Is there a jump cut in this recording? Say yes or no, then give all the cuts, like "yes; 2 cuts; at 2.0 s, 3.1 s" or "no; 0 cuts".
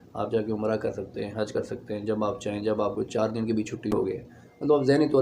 yes; 1 cut; at 3.9 s